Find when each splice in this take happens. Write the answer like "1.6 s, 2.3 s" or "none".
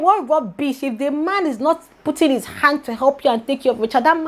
none

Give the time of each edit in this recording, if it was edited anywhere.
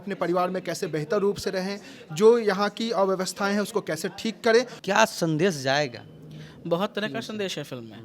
4.7 s

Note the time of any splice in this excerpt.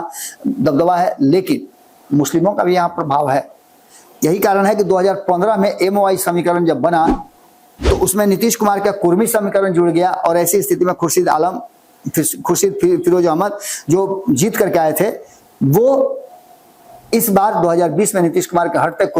none

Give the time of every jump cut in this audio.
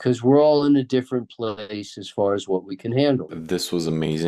3.3 s

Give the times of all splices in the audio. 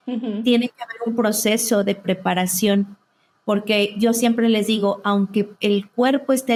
none

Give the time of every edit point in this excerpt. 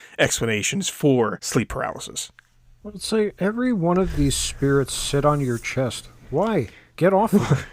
1.4 s

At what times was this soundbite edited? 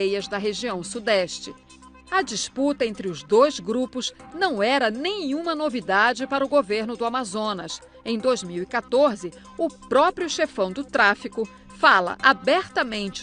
none

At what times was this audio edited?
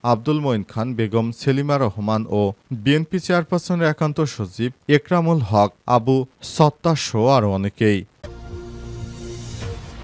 8.2 s

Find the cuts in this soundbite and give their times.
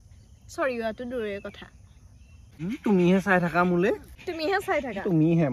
2.4 s

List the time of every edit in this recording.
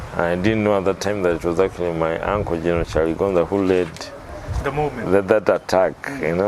none

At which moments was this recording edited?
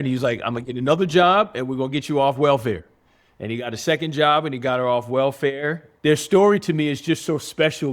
5.9 s

